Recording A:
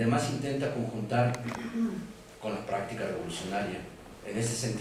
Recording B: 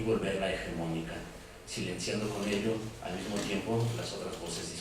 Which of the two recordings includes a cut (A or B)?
B